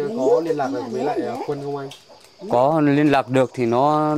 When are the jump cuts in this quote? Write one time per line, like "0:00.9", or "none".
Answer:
none